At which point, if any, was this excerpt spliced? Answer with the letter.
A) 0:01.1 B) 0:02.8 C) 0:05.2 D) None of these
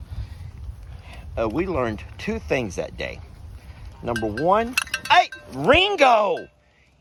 D